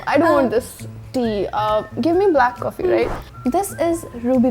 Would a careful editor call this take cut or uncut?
cut